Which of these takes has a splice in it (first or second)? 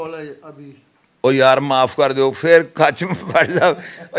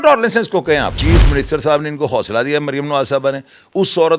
second